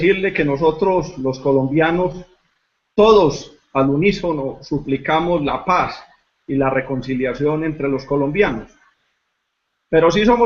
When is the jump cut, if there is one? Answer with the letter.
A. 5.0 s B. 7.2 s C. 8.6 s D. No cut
D